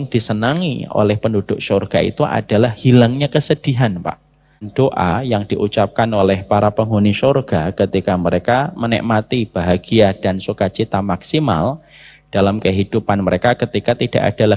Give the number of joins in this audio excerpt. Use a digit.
1